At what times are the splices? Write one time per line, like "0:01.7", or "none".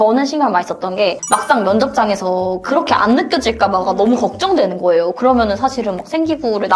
0:01.2